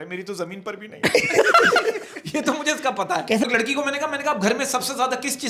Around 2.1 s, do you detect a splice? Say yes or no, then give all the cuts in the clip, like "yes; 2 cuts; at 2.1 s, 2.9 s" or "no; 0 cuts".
no; 1 cut; at 3.5 s